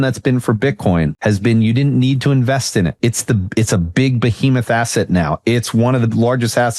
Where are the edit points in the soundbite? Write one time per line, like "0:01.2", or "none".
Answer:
0:01.1
0:02.9